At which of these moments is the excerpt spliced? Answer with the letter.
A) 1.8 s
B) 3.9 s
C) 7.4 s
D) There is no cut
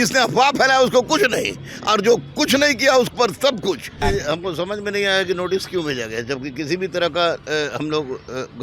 B